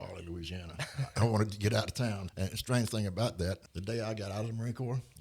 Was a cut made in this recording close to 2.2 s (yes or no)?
yes